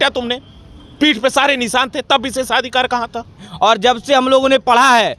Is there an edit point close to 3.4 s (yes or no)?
yes